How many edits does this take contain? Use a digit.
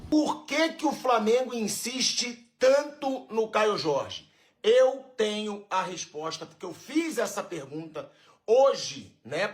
0